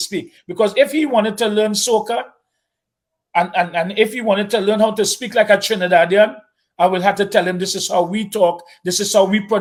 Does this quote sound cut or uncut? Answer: uncut